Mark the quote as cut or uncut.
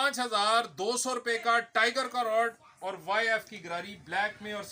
uncut